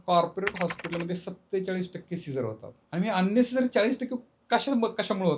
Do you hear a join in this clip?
yes; 1 cut; at 2.7 s

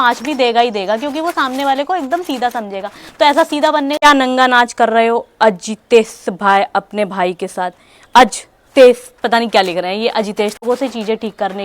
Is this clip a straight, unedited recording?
no; 2 cuts; at 4.0 s, 10.6 s

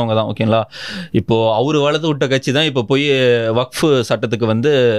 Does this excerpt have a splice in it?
no; 0 cuts

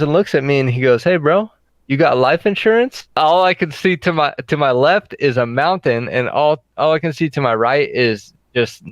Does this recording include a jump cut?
yes; 1 cut; at 3.2 s

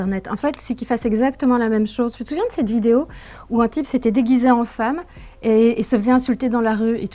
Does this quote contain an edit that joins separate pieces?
no; 0 cuts

